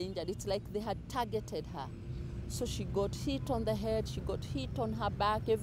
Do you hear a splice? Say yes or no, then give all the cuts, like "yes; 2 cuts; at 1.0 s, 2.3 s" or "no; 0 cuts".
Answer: no; 0 cuts